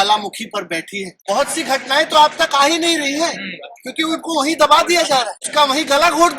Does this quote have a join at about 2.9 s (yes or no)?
no